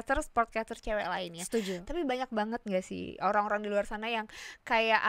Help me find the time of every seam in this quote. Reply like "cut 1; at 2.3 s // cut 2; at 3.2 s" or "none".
none